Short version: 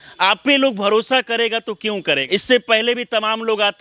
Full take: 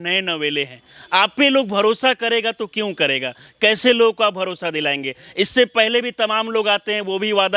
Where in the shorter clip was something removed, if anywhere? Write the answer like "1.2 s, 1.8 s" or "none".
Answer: 2.2 s

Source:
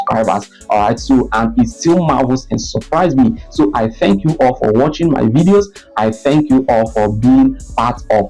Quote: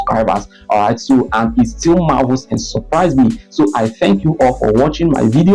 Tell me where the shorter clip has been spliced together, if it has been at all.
none

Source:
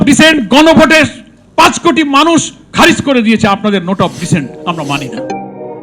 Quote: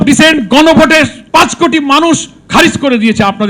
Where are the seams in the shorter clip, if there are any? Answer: 1.2 s

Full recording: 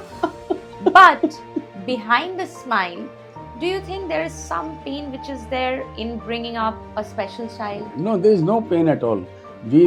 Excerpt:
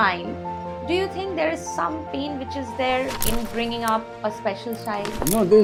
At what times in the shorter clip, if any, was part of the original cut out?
none

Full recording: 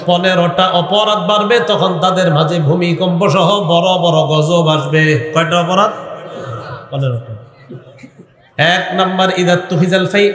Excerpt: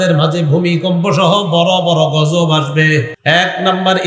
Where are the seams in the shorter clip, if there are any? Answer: 3.1 s

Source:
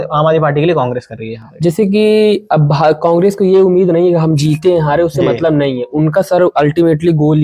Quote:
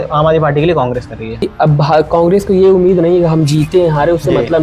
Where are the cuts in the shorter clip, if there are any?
1.5 s

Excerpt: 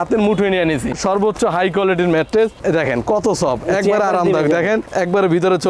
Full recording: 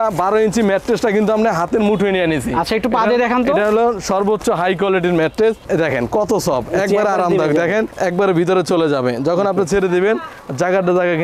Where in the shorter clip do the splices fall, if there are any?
0.9 s

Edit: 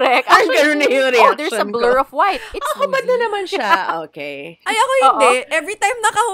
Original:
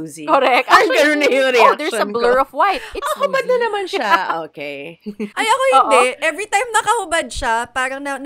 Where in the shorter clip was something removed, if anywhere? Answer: 4.5 s

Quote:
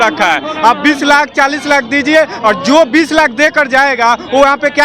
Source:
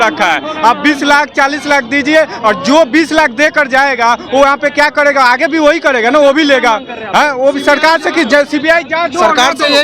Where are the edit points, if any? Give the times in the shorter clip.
none

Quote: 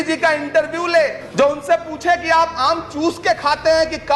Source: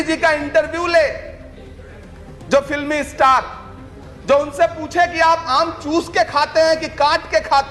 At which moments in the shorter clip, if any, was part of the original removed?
1.2 s

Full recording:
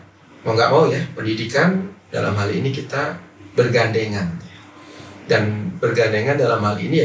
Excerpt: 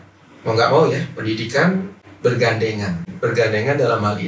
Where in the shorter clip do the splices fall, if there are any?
2.0 s, 3.1 s

